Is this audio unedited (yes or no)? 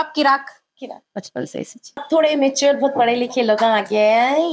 no